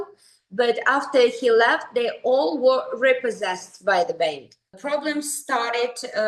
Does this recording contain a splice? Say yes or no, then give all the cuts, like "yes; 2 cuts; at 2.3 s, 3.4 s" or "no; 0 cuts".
yes; 1 cut; at 4.7 s